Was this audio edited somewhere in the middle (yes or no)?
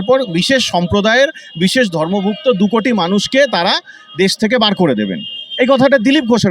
no